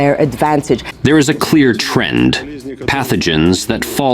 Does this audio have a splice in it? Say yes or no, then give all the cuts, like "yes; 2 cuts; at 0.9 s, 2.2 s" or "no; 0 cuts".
yes; 1 cut; at 0.9 s